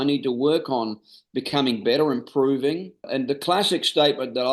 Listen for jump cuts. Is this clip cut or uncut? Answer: cut